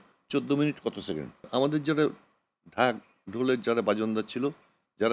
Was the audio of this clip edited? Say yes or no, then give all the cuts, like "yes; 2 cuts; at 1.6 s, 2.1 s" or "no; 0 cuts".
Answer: yes; 1 cut; at 1.5 s